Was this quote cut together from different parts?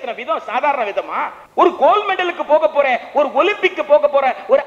yes; 1 cut; at 1.4 s

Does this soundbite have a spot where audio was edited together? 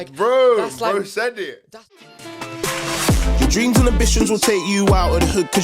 yes; 1 cut; at 1.5 s

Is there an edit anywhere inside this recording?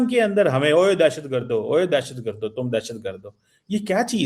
no; 0 cuts

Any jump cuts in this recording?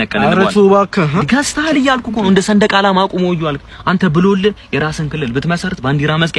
no; 0 cuts

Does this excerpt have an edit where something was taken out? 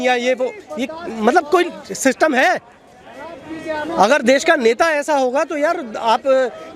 no; 0 cuts

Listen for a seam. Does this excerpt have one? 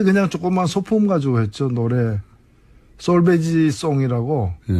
yes; 1 cut; at 1.7 s

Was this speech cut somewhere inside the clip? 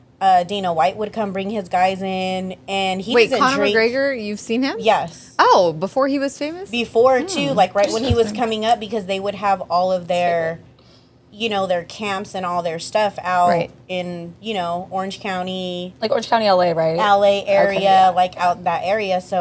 no; 0 cuts

